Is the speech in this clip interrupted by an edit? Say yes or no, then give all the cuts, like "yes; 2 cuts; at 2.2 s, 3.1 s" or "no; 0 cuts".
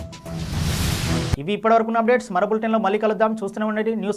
no; 0 cuts